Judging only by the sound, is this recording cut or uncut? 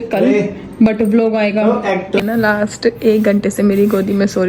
cut